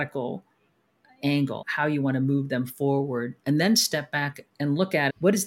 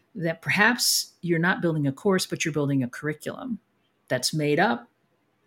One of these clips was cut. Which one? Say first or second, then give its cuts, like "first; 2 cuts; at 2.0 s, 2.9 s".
first; 2 cuts; at 1.6 s, 4.6 s